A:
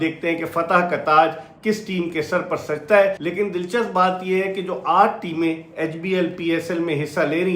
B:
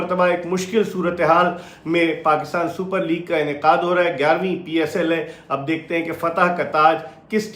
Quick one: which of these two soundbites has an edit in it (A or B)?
A